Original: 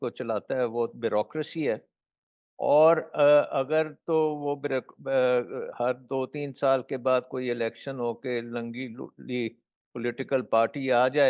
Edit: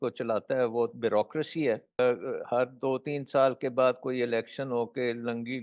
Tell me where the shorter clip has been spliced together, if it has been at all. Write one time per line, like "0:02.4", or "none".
0:02.0